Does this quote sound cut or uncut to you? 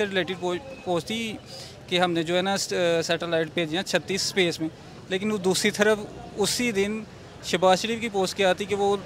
uncut